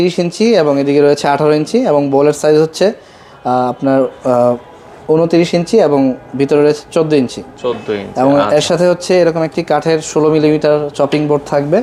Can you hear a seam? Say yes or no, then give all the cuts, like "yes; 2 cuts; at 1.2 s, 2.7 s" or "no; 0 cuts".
no; 0 cuts